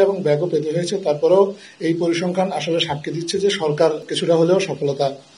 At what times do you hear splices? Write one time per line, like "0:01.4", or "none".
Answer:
0:04.1